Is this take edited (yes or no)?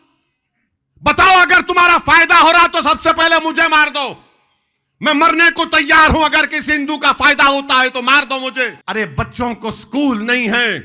yes